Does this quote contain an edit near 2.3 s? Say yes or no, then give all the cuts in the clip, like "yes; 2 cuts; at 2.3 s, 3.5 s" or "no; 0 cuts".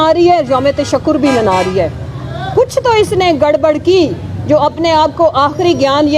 no; 0 cuts